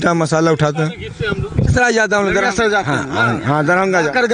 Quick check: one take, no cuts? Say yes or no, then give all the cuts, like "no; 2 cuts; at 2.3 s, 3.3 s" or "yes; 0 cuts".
no; 1 cut; at 1.7 s